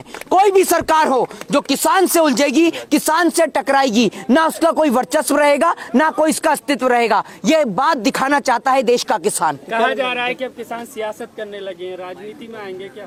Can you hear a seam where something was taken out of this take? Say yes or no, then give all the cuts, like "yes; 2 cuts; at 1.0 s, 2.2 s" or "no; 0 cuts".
no; 0 cuts